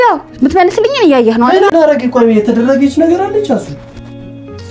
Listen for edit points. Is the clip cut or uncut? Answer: cut